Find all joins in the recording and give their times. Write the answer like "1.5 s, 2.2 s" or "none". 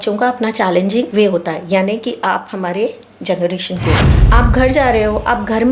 1.1 s, 4.1 s

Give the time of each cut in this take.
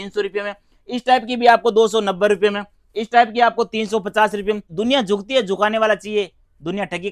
4.7 s

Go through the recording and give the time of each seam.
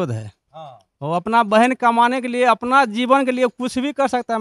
none

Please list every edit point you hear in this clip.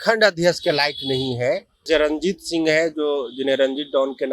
1.8 s

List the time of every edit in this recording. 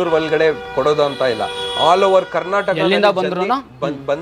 none

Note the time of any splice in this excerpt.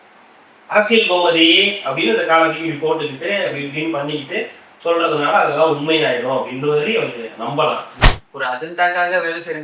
8.0 s

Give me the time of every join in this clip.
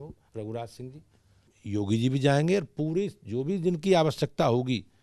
1.5 s

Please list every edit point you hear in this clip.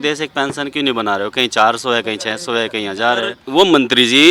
3.4 s

